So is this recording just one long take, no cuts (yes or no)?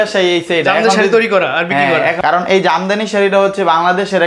yes